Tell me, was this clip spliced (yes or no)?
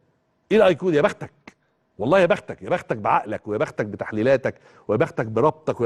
no